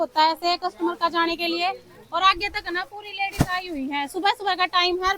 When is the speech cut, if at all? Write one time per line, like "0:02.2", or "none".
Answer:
none